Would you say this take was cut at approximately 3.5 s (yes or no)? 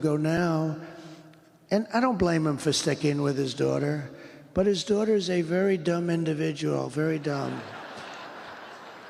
no